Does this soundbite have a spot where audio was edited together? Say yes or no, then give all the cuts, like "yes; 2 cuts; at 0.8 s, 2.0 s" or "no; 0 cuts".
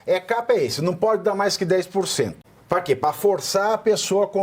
yes; 1 cut; at 2.5 s